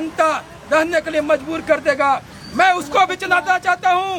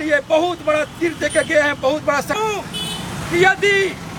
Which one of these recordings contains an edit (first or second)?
second